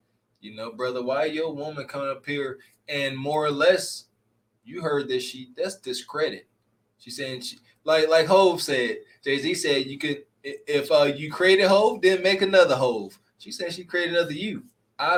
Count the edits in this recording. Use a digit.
0